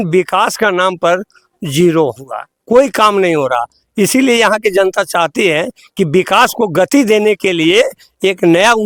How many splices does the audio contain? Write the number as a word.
zero